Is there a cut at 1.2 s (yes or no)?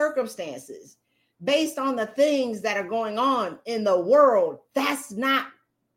no